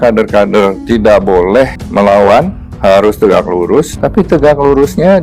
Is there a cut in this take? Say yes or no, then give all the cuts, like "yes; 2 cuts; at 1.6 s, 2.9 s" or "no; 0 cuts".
yes; 3 cuts; at 1.8 s, 2.6 s, 4.0 s